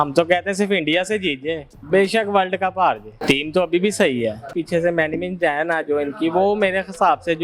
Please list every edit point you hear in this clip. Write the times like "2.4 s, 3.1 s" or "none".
3.1 s, 4.6 s